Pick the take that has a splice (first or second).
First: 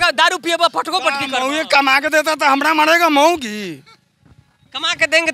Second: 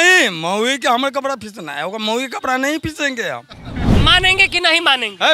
second